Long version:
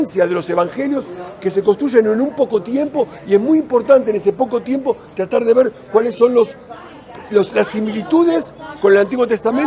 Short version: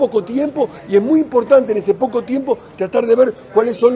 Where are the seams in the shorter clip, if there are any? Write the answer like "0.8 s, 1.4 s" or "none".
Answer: none